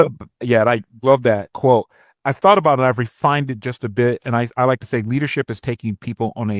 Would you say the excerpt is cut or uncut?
cut